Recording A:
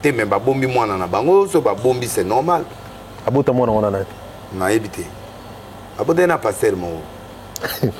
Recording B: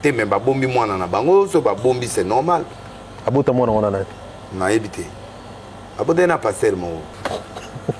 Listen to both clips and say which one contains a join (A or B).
B